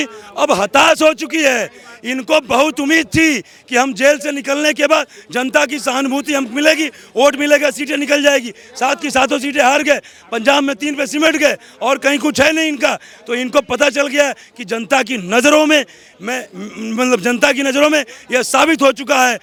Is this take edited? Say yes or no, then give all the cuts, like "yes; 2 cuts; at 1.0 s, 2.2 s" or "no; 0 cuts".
no; 0 cuts